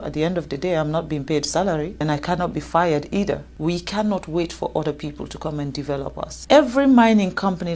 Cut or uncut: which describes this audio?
cut